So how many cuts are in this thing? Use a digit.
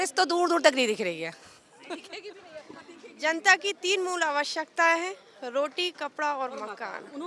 0